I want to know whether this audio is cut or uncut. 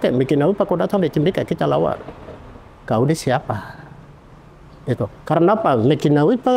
uncut